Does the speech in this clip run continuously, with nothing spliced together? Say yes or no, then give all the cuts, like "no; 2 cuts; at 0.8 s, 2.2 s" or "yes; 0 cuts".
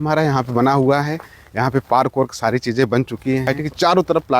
no; 1 cut; at 3.5 s